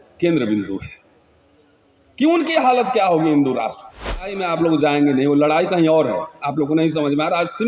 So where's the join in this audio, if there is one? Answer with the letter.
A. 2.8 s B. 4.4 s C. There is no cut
B